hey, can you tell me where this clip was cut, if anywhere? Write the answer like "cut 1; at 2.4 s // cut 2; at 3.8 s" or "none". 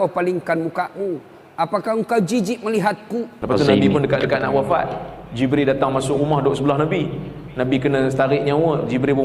cut 1; at 3.6 s